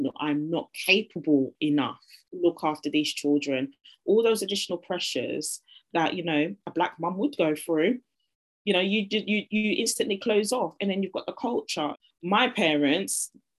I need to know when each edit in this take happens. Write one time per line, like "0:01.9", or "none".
0:02.2
0:12.0